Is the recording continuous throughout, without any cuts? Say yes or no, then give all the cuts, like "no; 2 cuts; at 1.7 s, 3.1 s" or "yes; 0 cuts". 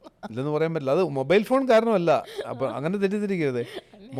yes; 0 cuts